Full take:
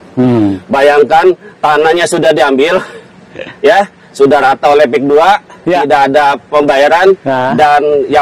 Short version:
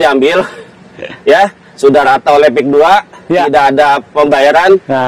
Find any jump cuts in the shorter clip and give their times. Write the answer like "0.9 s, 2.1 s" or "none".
none